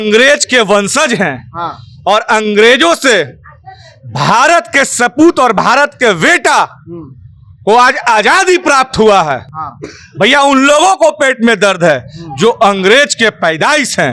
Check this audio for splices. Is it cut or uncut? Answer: uncut